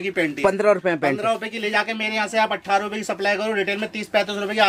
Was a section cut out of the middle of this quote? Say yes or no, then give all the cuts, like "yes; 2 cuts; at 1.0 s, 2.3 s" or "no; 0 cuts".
no; 0 cuts